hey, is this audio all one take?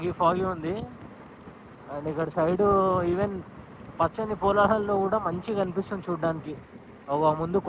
yes; 0 cuts

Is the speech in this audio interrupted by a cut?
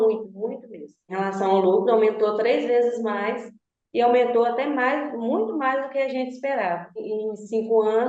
yes; 2 cuts; at 1.1 s, 7.1 s

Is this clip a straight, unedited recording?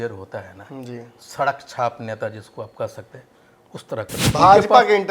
no; 1 cut; at 4.2 s

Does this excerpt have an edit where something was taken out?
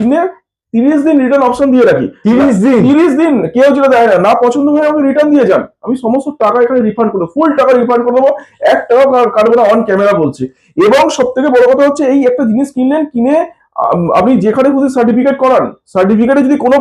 no; 0 cuts

